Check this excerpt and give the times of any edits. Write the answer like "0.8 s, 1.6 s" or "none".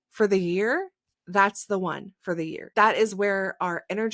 2.7 s